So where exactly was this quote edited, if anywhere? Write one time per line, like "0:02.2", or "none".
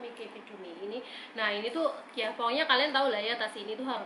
none